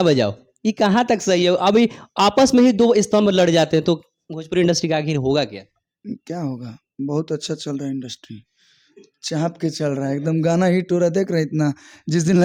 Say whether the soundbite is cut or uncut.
uncut